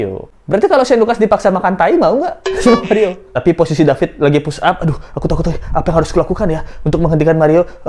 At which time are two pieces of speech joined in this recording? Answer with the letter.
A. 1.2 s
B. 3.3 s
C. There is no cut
B